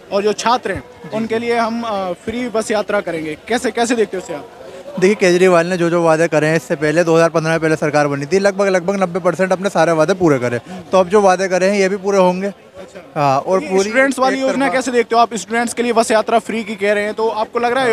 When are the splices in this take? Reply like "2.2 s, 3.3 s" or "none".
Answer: none